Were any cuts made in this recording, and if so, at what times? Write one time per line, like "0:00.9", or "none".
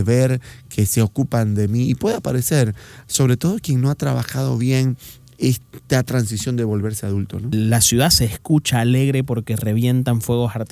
0:07.5